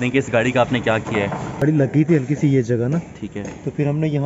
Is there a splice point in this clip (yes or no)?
yes